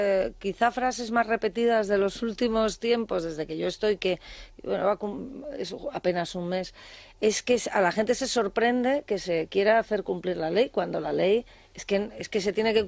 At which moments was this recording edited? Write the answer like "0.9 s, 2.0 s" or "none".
none